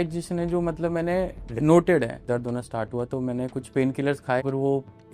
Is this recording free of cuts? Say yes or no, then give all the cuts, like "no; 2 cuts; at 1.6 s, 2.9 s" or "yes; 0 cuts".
no; 3 cuts; at 1.4 s, 2.3 s, 4.4 s